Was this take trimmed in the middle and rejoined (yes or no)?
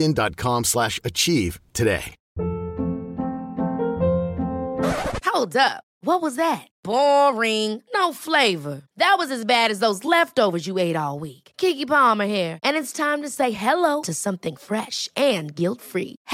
yes